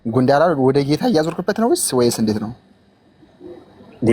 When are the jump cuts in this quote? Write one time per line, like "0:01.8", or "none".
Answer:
none